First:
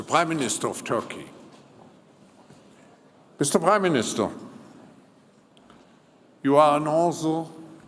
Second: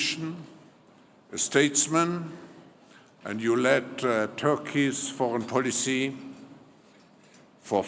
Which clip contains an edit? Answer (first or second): second